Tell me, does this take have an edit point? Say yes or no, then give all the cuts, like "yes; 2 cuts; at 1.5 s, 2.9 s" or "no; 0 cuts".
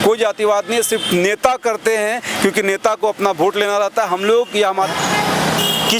yes; 1 cut; at 4.9 s